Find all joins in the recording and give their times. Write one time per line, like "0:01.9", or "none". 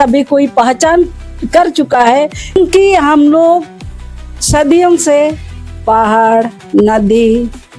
0:02.6

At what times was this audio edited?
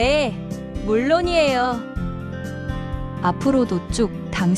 none

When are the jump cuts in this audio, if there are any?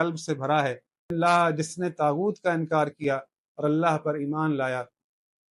0:01.1

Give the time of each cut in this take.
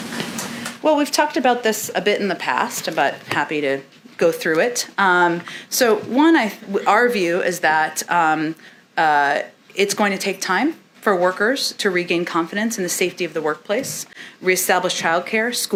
none

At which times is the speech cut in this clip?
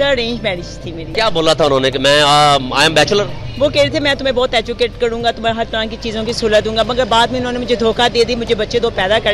0:01.0

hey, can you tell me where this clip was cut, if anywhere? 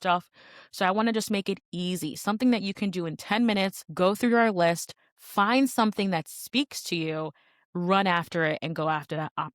0:03.8

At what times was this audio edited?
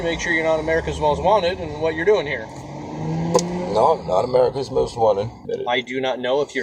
0:05.4

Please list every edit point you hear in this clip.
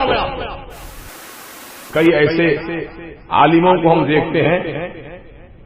0:01.4

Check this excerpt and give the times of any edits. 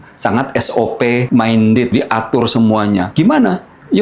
0:01.3
0:01.9
0:03.1

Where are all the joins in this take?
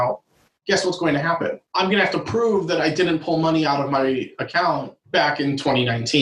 0:01.6
0:05.0

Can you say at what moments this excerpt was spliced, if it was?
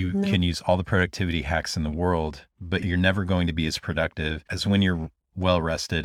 0:02.8

